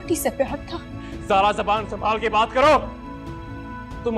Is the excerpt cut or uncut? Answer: uncut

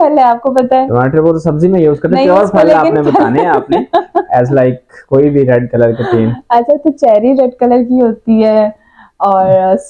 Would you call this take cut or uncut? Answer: uncut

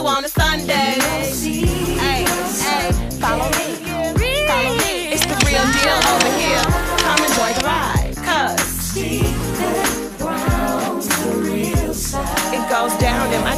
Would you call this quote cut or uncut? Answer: uncut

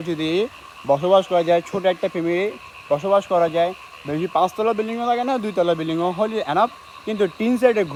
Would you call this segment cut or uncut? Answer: uncut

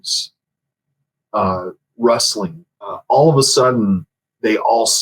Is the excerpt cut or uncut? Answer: cut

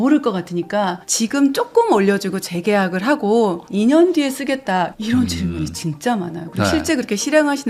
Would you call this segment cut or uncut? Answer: uncut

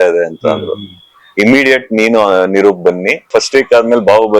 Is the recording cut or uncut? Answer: cut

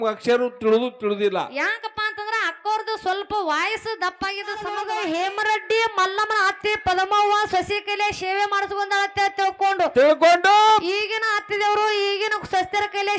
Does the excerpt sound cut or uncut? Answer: cut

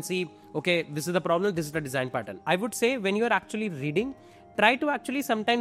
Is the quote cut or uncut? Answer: cut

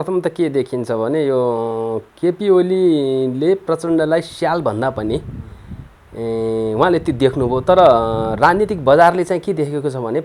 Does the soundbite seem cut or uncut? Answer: uncut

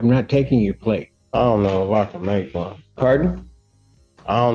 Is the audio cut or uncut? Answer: cut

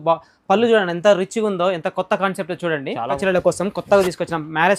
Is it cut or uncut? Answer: cut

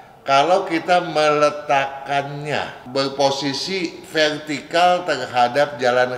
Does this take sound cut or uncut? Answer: cut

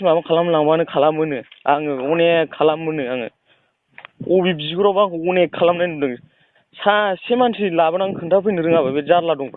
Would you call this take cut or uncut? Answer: uncut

